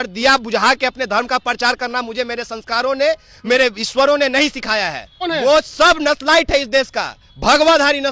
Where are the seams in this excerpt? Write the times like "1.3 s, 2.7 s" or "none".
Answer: 5.1 s

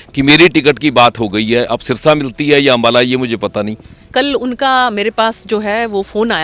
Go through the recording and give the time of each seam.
4.1 s

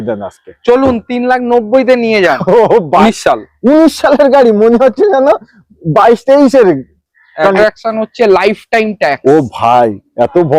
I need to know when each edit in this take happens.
3.0 s, 7.6 s

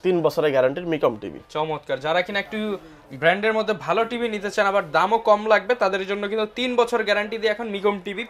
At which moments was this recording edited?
none

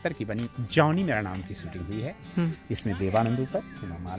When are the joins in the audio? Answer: none

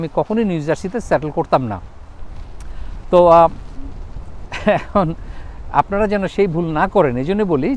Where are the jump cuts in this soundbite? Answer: none

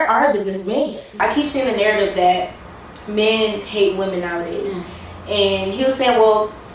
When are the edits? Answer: 1.2 s

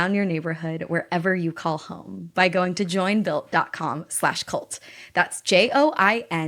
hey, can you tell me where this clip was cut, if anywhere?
none

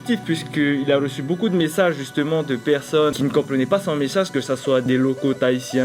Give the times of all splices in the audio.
none

